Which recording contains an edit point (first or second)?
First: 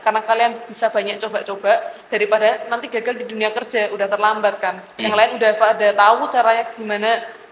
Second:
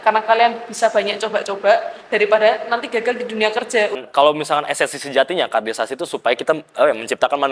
second